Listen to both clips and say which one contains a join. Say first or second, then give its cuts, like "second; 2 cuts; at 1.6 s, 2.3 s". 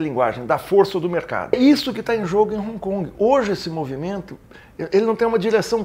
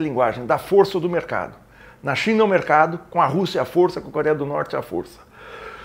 first; 1 cut; at 1.5 s